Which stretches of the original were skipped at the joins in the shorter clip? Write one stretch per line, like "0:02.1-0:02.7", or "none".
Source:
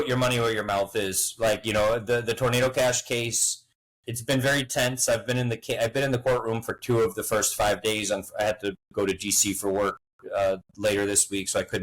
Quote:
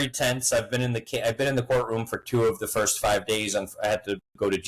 none